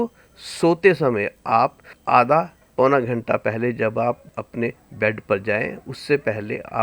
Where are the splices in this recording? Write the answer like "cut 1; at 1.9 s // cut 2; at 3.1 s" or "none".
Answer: cut 1; at 1.9 s // cut 2; at 2.6 s // cut 3; at 4.3 s